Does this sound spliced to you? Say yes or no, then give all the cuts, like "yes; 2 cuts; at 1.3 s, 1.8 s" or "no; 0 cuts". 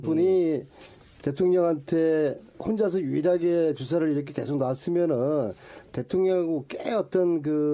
yes; 1 cut; at 2.5 s